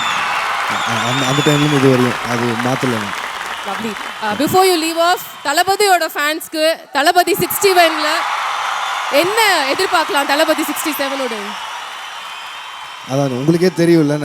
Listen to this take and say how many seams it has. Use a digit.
0